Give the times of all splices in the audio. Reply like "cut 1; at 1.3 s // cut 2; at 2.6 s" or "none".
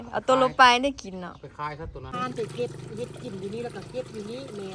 cut 1; at 2.1 s

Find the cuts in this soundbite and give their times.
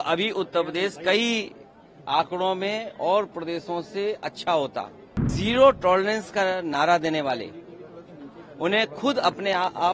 cut 1; at 5.3 s

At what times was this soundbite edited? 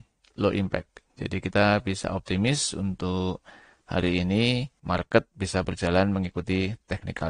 none

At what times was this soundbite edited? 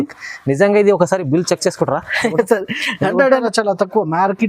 cut 1; at 3.4 s

